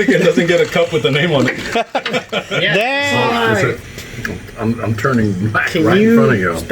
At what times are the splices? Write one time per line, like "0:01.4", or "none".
0:03.1

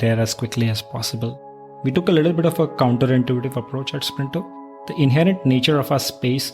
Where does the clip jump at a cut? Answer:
0:01.8
0:04.9

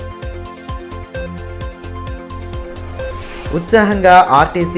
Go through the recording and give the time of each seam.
0:01.4
0:02.1

